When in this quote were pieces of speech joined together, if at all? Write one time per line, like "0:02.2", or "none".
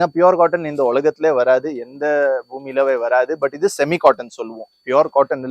none